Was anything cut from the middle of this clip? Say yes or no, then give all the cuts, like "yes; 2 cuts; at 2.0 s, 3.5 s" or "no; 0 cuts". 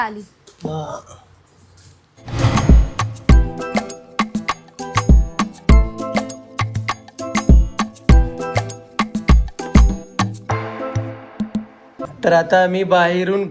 no; 0 cuts